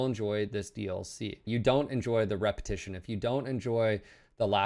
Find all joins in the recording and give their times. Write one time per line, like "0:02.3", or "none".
0:01.4